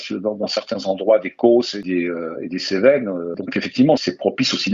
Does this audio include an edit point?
no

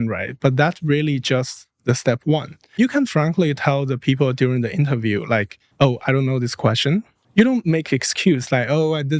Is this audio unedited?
no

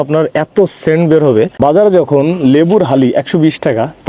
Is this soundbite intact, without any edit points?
no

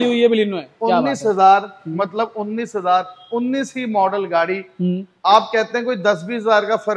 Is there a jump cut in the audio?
no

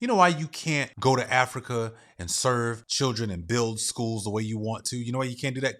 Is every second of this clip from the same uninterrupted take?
no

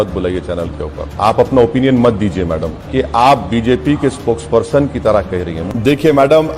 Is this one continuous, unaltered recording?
no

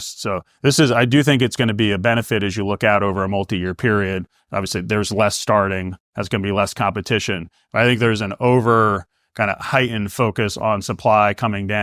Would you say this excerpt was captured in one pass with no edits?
yes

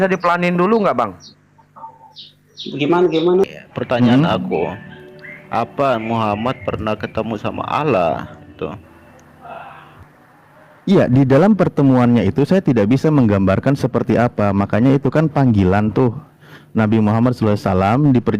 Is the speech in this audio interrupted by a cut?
yes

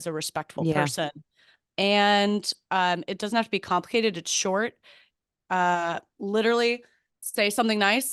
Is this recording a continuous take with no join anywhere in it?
yes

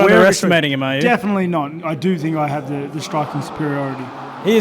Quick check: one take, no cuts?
no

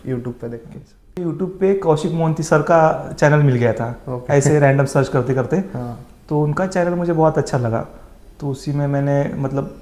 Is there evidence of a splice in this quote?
yes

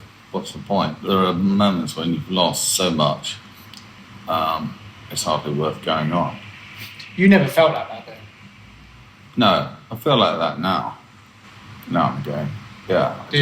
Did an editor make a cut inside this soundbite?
yes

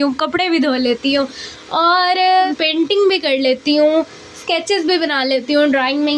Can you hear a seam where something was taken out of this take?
yes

